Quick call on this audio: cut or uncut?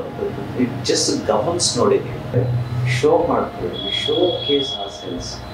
cut